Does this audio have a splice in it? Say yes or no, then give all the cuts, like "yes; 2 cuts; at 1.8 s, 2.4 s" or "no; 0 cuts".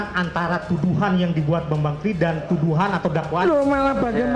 no; 0 cuts